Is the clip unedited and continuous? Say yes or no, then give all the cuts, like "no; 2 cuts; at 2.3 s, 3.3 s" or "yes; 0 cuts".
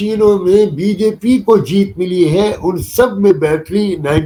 yes; 0 cuts